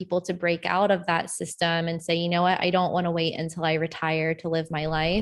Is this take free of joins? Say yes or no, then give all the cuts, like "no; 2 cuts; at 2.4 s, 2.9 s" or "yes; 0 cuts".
yes; 0 cuts